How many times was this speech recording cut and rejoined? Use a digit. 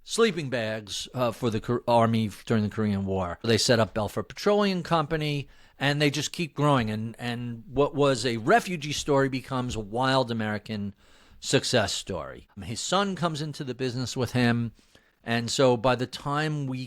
1